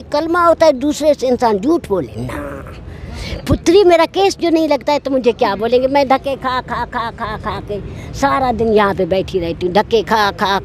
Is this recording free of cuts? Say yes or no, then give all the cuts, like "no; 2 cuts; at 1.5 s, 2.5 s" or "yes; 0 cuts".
no; 1 cut; at 3.3 s